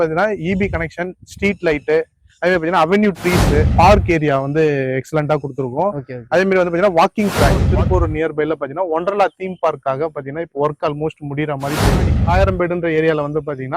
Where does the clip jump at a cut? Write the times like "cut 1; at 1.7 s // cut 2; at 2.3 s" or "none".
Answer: cut 1; at 7.6 s // cut 2; at 12.1 s